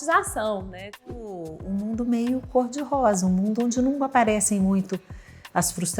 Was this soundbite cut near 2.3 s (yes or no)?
no